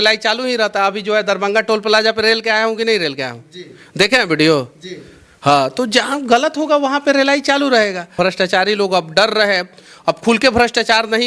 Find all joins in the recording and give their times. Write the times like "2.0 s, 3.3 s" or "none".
8.1 s

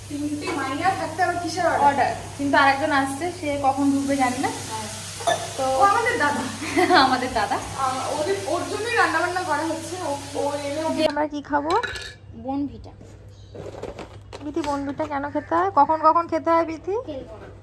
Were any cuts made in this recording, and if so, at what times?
11.1 s

